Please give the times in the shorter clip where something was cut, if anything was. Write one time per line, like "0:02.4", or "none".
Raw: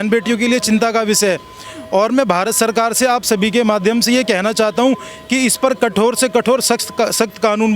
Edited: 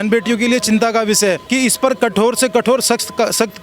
0:01.4